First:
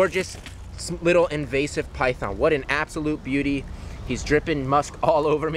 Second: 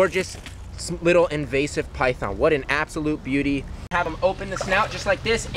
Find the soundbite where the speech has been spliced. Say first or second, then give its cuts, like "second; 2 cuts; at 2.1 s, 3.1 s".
second; 1 cut; at 4.1 s